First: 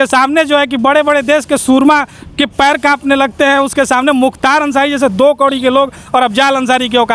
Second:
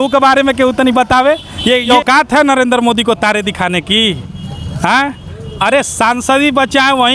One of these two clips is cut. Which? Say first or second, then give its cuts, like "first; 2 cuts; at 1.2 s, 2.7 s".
second; 1 cut; at 1.9 s